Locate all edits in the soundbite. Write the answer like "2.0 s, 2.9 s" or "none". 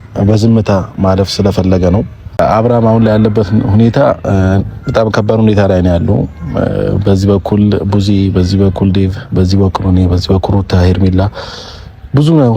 2.4 s